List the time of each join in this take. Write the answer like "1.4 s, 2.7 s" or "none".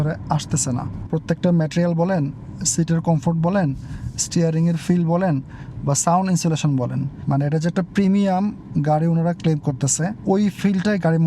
1.0 s, 7.1 s, 10.2 s